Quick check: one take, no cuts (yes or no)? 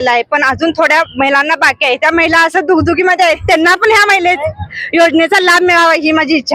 yes